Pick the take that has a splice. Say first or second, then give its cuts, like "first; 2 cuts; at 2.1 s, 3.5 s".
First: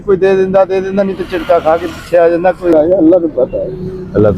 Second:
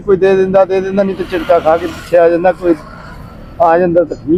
first; 1 cut; at 2.7 s